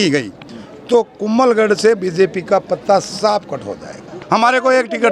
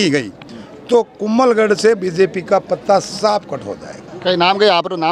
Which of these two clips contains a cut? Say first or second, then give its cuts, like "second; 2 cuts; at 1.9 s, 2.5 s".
first; 1 cut; at 4.1 s